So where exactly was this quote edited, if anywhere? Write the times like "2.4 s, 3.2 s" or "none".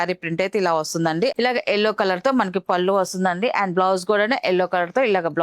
1.3 s